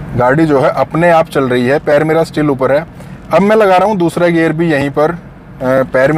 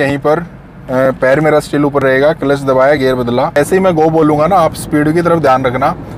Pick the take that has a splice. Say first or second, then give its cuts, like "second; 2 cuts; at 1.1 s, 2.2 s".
second; 1 cut; at 3.5 s